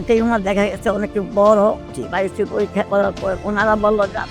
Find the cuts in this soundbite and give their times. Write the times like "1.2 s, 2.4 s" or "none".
1.8 s, 3.4 s